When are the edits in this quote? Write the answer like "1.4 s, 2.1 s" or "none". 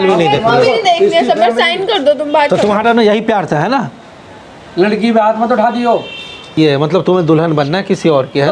6.6 s